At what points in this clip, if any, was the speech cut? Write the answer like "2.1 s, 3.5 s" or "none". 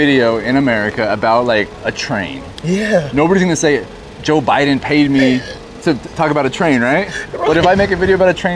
none